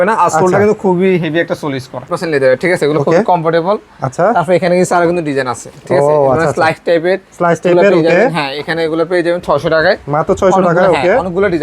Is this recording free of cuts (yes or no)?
no